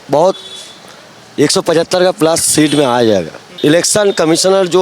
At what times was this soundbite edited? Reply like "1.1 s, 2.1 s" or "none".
3.4 s